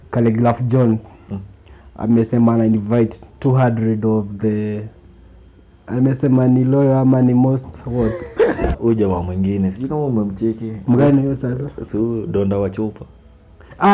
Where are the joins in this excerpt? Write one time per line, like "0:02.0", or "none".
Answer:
0:08.8